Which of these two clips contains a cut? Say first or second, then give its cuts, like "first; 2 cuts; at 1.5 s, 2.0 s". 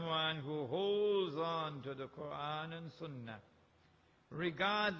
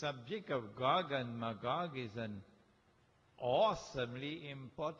first; 1 cut; at 2.3 s